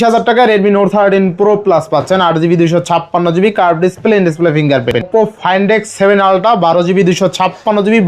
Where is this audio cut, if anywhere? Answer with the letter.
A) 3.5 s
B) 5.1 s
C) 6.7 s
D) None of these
B